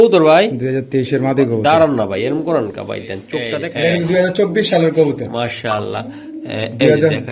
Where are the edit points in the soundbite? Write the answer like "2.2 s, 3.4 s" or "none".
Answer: 3.6 s